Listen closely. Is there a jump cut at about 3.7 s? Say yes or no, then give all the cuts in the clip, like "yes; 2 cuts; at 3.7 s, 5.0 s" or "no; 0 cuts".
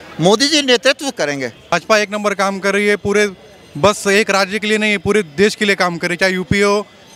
no; 1 cut; at 1.7 s